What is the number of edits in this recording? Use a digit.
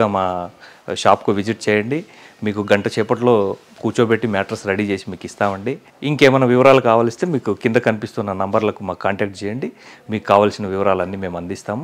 0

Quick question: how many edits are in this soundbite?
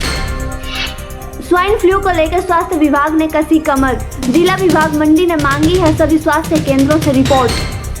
1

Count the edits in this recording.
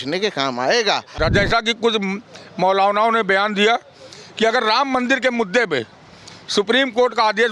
1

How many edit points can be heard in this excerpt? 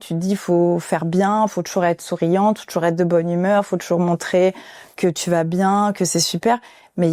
0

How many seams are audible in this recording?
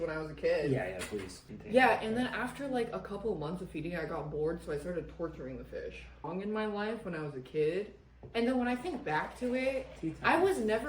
2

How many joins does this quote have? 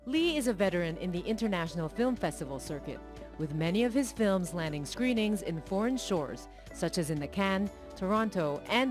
1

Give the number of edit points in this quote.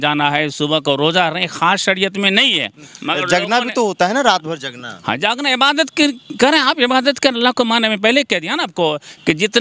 0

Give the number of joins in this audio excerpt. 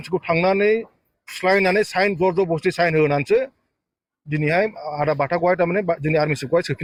0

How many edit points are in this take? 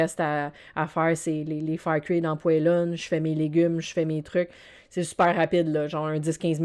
0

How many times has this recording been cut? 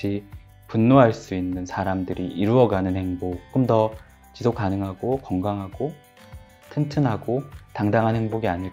1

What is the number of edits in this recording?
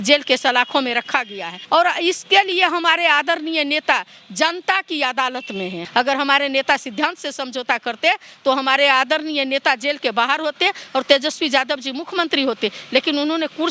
2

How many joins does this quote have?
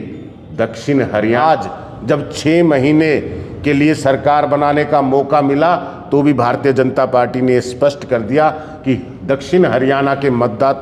1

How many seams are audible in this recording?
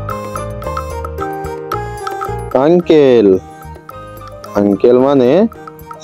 1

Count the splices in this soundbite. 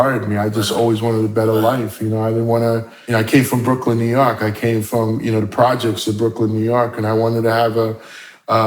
1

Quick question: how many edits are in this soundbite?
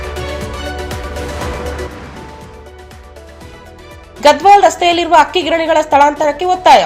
0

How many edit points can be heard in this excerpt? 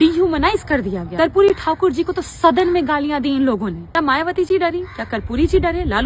2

